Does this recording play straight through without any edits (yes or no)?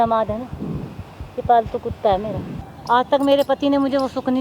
no